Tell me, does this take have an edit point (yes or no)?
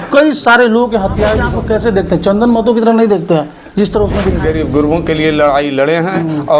yes